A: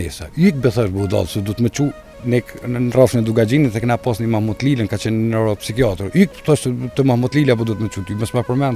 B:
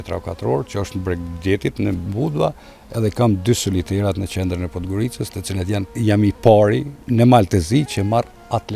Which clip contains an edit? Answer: B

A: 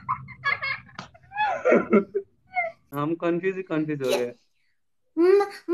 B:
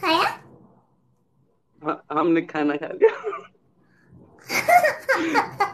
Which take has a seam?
A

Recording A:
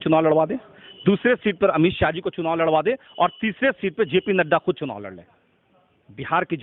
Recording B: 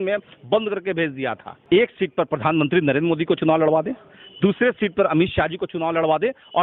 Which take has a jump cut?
B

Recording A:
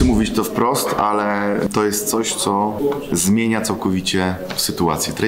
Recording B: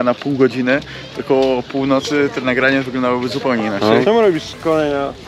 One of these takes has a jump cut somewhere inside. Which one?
B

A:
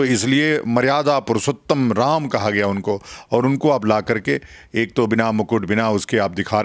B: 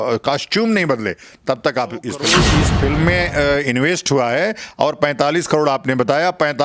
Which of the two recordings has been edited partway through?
B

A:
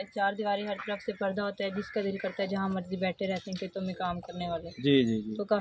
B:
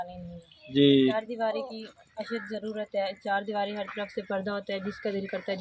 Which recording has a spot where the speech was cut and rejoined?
B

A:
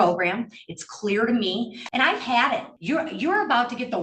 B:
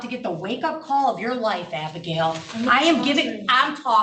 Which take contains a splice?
A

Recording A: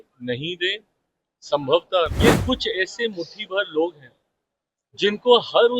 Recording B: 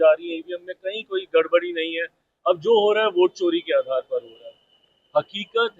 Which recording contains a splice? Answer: A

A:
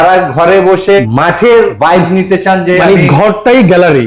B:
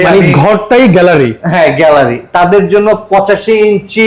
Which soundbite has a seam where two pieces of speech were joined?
A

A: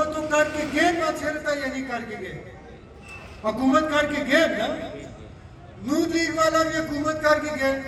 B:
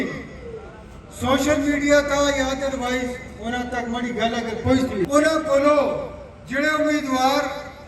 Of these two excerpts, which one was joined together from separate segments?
B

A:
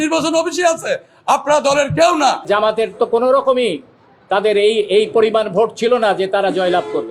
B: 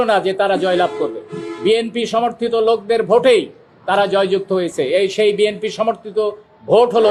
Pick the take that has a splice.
A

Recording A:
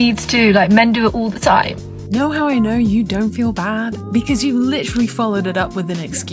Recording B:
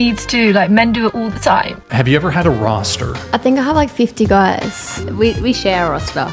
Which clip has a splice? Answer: B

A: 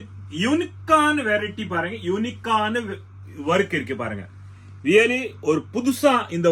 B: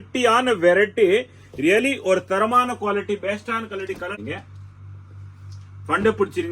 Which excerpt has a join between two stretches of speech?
B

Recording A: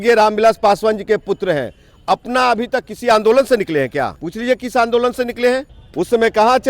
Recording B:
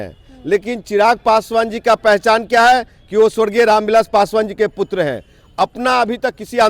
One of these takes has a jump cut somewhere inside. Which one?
A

